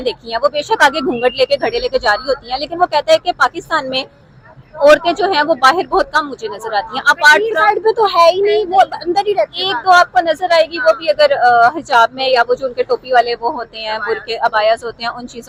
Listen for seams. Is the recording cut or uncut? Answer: uncut